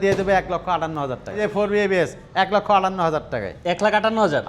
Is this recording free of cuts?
no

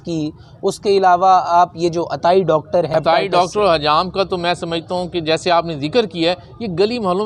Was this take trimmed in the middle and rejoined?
yes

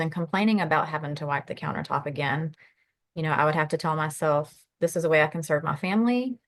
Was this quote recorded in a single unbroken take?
yes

